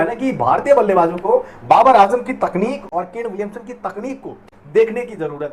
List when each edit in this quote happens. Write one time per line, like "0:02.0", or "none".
none